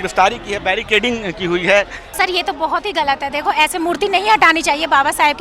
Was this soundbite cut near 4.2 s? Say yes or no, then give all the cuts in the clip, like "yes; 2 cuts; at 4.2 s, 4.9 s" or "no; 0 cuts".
no; 1 cut; at 2.2 s